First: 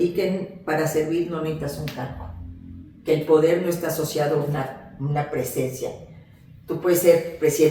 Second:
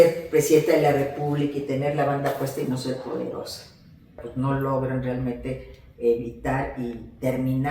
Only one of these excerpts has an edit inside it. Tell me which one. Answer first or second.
second